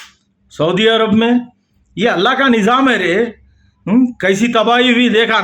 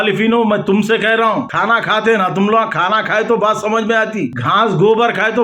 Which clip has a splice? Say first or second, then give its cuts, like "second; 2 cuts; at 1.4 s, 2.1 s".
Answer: second; 2 cuts; at 1.5 s, 4.4 s